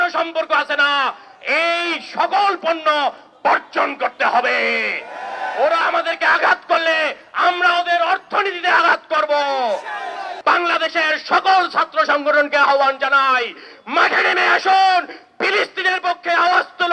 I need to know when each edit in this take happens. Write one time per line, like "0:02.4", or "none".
0:10.3